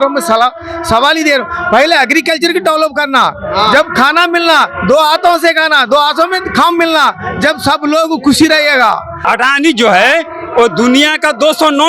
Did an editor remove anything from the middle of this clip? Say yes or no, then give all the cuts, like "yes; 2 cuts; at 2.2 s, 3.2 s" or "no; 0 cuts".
yes; 1 cut; at 9.2 s